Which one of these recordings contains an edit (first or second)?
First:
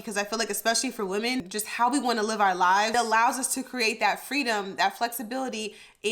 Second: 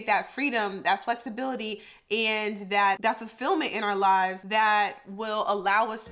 first